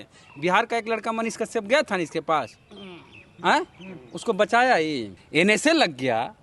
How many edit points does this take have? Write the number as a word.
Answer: one